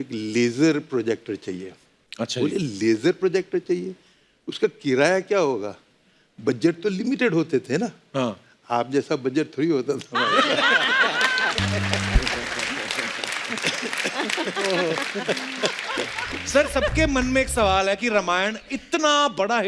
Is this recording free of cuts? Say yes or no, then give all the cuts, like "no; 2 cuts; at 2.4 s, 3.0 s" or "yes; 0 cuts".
no; 1 cut; at 16.4 s